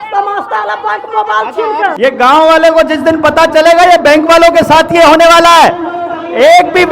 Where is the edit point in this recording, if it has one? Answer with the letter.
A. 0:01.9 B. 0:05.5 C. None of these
A